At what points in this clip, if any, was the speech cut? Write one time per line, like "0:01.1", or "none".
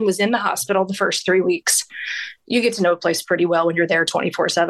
none